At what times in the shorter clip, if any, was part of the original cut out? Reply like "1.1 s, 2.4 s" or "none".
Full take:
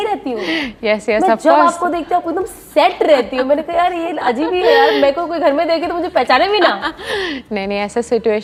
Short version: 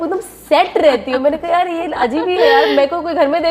none